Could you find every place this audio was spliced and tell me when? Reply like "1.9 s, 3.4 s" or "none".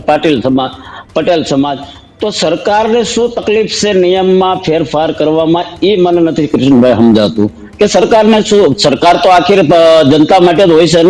none